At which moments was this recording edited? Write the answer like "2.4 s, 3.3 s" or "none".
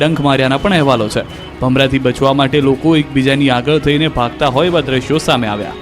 3.1 s